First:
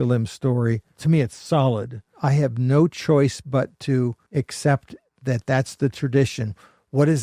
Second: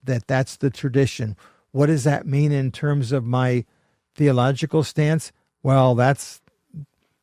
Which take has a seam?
first; 3 cuts; at 0.9 s, 2.1 s, 4.2 s

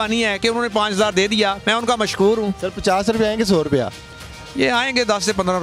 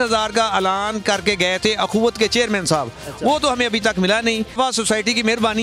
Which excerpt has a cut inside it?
second; 1 cut; at 4.5 s

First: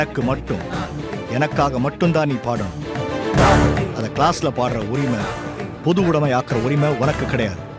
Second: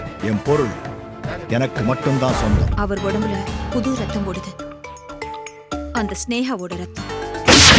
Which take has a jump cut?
second; 1 cut; at 2.7 s

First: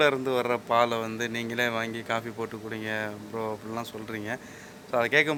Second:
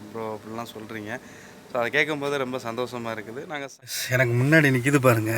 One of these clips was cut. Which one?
second; 1 cut; at 3.6 s

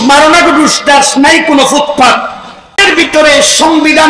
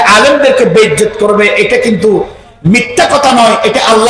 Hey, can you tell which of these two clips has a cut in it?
first; 1 cut; at 2.7 s

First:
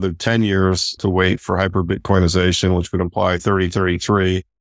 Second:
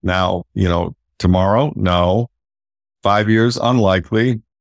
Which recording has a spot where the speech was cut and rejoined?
first; 1 cut; at 1.0 s

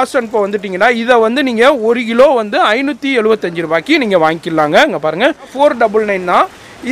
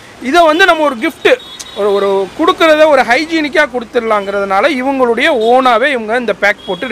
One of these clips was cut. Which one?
first; 1 cut; at 5.5 s

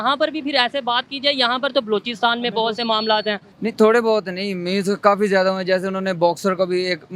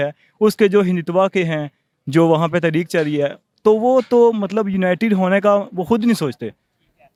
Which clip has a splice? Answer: first; 1 cut; at 3.5 s

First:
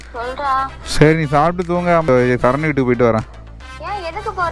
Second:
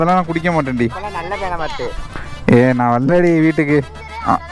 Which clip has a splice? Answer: first; 1 cut; at 2.2 s

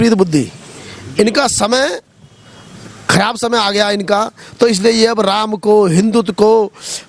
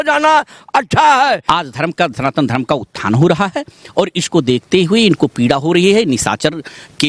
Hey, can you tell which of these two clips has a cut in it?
second; 1 cut; at 1.4 s

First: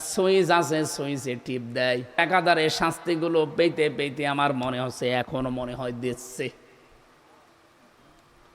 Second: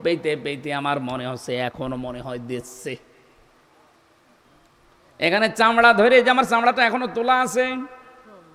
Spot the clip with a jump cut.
first; 1 cut; at 2.2 s

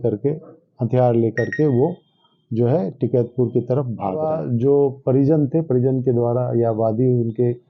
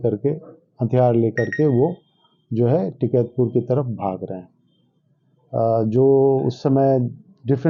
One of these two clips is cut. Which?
first; 1 cut; at 4.4 s

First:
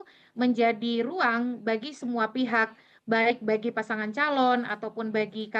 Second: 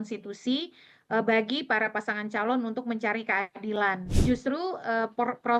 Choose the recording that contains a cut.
second; 1 cut; at 4.1 s

